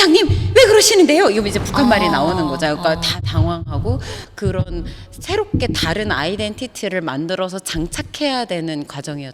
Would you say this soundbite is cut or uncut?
uncut